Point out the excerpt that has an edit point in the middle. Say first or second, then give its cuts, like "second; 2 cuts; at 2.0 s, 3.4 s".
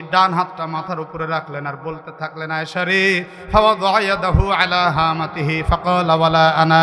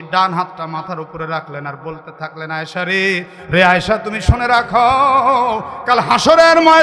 second; 1 cut; at 3.4 s